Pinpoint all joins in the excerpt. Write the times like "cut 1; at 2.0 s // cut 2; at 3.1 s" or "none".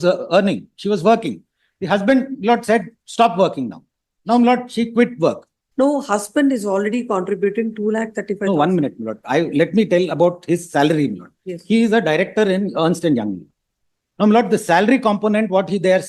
cut 1; at 5.6 s